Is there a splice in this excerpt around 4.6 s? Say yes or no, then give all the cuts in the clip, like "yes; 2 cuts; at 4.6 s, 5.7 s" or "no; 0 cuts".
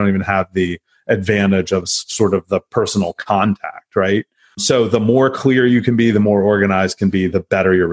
yes; 1 cut; at 4.6 s